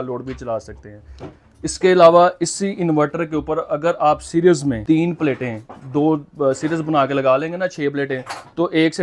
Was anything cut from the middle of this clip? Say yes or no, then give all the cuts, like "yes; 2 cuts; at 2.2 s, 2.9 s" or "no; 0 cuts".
no; 0 cuts